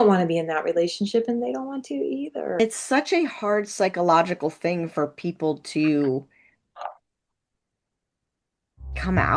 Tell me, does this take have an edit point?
yes; 1 cut; at 2.6 s

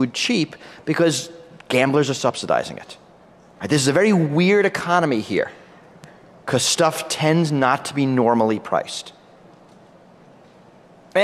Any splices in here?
no; 0 cuts

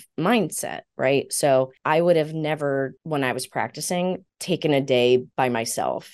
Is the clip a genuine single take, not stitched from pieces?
no; 4 cuts; at 1.8 s, 3.0 s, 4.3 s, 5.3 s

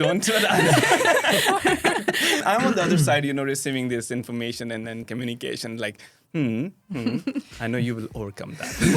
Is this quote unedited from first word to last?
no; 2 cuts; at 2.4 s, 5.1 s

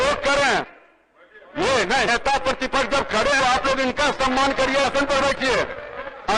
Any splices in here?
no; 0 cuts

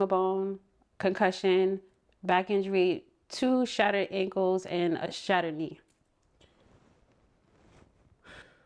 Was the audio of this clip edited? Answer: no; 0 cuts

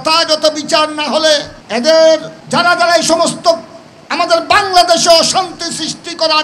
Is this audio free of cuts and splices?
no; 2 cuts; at 1.6 s, 2.3 s

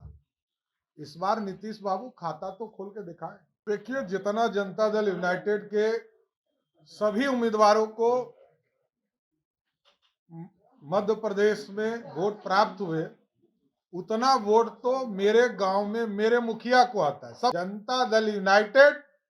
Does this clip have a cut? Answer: yes; 2 cuts; at 3.5 s, 17.5 s

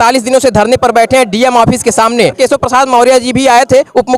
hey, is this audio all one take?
no; 1 cut; at 2.4 s

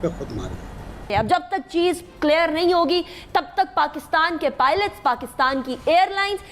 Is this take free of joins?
no; 1 cut; at 1.1 s

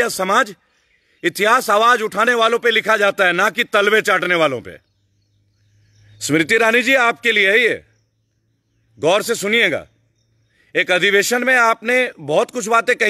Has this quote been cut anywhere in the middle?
no; 0 cuts

